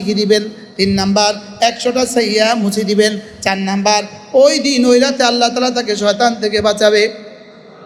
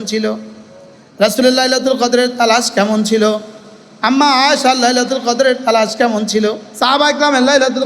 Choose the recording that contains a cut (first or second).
second